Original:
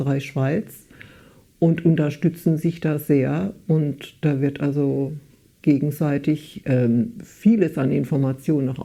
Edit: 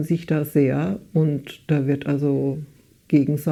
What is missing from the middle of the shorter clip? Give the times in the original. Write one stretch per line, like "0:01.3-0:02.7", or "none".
none

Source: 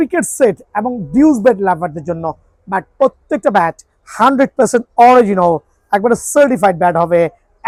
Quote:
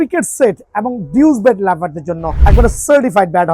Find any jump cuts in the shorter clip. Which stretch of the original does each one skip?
0:02.3-0:05.8

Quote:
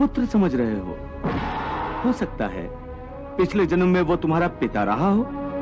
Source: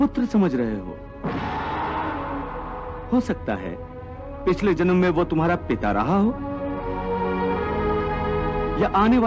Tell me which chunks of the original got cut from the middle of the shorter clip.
0:02.0-0:03.0

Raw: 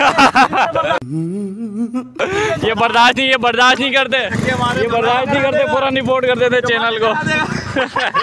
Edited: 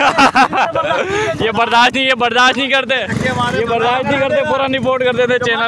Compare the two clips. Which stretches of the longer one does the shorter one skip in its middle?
0:01.0-0:02.2

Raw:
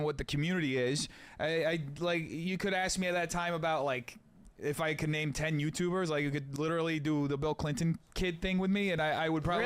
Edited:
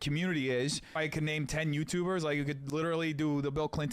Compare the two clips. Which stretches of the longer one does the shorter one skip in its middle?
0:01.2-0:04.8

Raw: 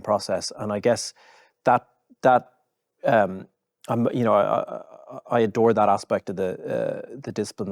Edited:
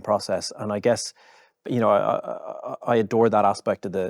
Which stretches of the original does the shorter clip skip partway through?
0:01.6-0:04.1

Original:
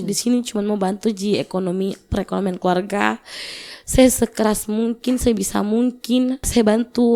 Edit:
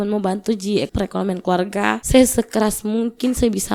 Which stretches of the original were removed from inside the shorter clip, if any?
0:01.5-0:02.1
0:03.2-0:03.9

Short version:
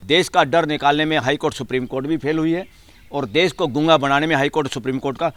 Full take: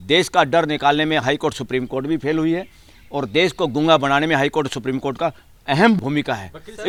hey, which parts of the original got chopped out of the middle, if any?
none

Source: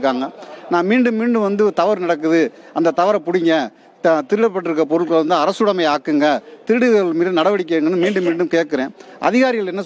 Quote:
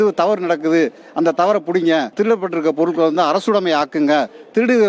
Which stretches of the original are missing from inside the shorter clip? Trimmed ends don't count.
0:03.7-0:04.2

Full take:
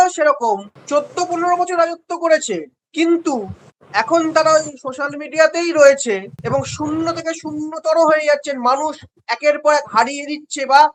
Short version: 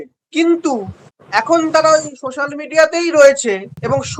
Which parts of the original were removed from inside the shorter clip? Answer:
none

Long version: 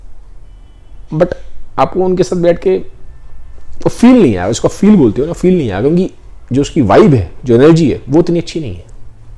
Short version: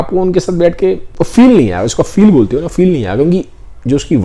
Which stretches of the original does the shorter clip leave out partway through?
0:02.9-0:03.7

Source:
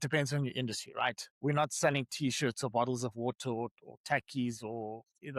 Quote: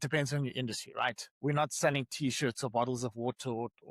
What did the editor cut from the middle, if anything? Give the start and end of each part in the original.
none

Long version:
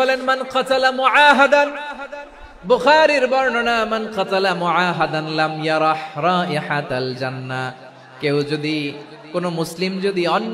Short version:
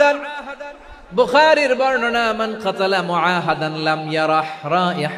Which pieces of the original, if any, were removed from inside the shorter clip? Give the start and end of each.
none

